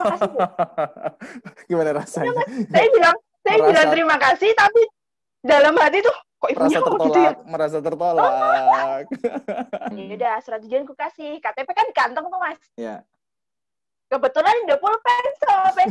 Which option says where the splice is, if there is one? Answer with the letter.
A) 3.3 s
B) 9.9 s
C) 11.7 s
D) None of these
B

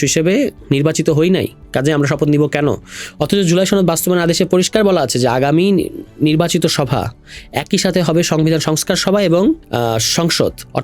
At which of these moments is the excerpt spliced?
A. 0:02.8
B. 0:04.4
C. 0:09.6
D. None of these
C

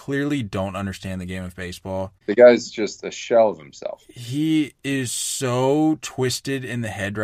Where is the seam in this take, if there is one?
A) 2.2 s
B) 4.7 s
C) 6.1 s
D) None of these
A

